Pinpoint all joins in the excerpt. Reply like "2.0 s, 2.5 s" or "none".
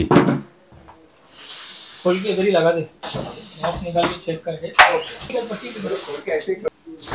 3.0 s, 5.3 s